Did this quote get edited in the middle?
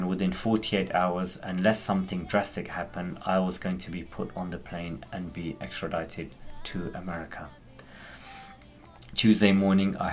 no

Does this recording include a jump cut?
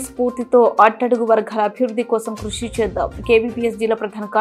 no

